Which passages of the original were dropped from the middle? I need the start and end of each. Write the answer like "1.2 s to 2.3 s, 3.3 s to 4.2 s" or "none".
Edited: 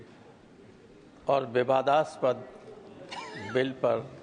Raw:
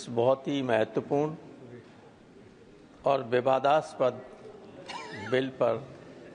none

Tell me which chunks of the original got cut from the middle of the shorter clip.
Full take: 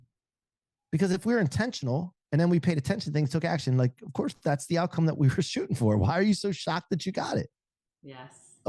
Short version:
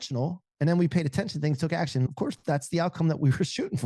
3.8 s to 4.0 s

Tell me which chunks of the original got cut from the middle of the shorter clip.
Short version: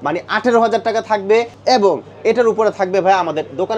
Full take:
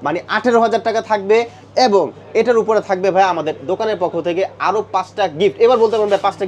1.5 s to 1.6 s

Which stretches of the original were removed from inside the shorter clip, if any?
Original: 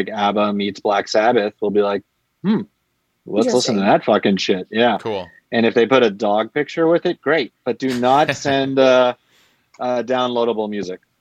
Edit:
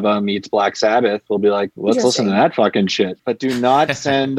2.0 s to 3.2 s, 4.7 s to 7.6 s

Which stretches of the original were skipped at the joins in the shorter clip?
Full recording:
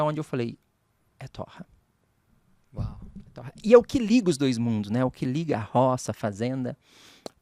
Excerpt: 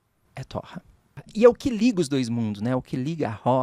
2.1 s to 3.5 s

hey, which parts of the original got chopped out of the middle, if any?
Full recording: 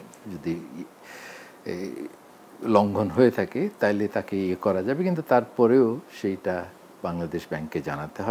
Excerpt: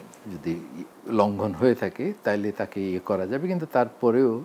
0.9 s to 2.5 s

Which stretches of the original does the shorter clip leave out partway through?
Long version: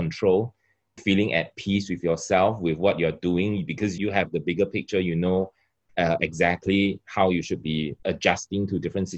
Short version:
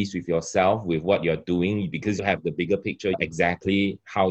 4.0 s to 4.1 s, 5.1 s to 6.2 s

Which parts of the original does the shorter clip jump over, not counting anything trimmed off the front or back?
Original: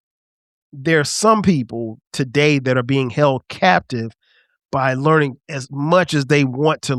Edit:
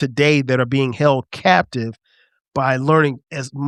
none

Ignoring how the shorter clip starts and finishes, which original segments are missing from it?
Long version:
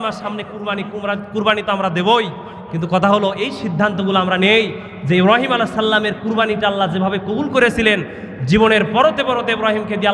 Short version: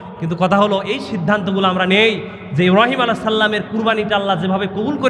none

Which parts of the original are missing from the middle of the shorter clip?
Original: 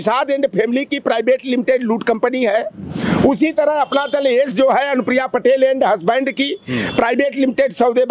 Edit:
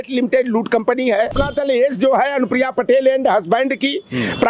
2.7 s to 3.9 s

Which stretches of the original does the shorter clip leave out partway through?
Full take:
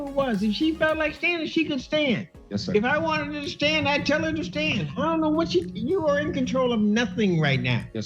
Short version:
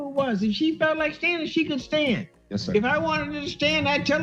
none

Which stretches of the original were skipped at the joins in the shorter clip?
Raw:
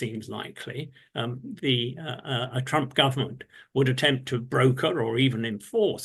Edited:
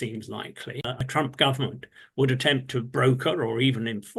1.0 s to 2.6 s

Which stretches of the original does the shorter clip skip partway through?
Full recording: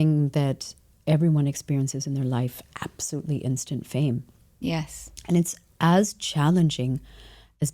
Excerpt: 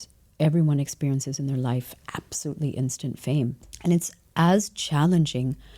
4.3 s to 5.1 s

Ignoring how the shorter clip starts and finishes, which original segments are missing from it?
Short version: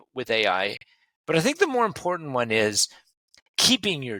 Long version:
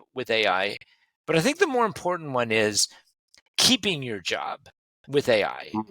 none

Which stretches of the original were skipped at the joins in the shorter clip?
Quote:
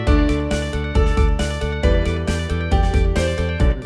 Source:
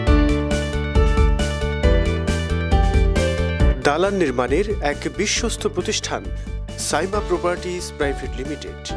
none

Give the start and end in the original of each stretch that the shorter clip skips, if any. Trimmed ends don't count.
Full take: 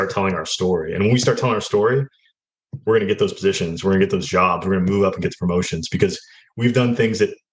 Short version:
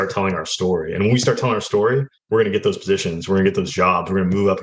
2.1 s to 2.7 s

